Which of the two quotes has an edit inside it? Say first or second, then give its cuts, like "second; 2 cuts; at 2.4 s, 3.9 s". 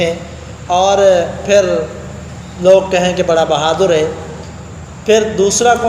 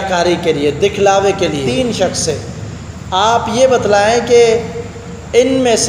second; 1 cut; at 1.7 s